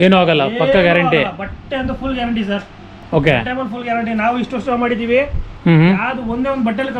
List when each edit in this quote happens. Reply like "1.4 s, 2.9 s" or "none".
none